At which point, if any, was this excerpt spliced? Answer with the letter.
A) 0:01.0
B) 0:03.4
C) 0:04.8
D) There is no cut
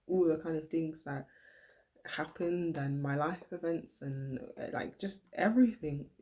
D